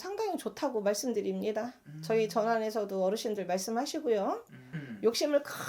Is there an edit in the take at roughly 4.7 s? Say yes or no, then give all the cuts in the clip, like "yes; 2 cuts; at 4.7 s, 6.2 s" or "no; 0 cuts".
yes; 1 cut; at 4.7 s